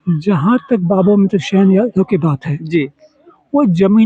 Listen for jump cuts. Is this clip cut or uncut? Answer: uncut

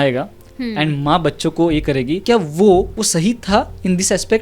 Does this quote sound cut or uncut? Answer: cut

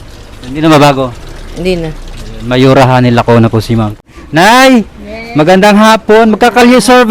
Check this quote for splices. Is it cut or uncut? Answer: cut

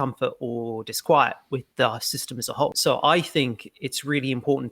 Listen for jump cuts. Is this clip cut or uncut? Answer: cut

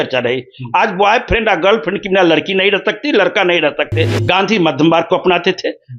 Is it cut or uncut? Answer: cut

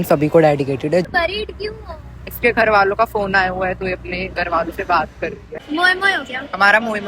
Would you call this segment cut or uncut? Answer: cut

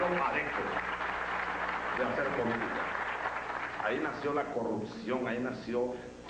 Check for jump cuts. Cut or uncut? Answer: uncut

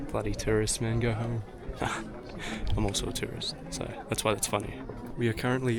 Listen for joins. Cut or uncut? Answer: uncut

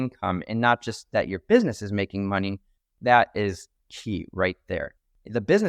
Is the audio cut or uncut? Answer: uncut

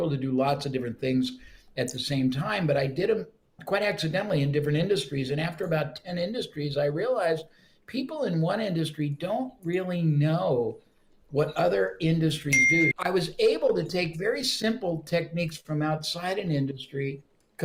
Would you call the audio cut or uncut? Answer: uncut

